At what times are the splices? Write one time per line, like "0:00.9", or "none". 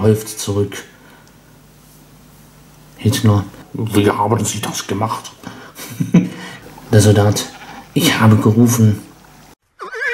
0:03.6
0:06.5